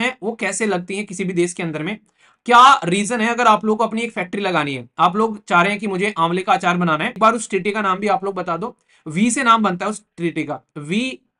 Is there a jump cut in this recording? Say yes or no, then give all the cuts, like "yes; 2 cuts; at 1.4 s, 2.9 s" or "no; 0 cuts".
yes; 1 cut; at 7.2 s